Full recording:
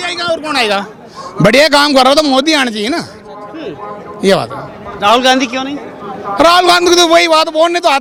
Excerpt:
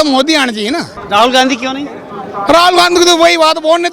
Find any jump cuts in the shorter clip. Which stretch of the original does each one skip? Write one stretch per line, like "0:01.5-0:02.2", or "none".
0:03.1-0:04.9